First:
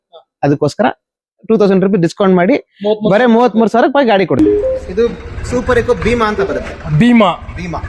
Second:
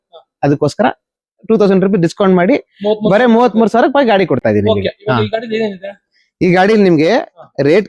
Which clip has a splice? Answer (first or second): first